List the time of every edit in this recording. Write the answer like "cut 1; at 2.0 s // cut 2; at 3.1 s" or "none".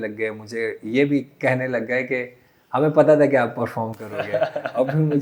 none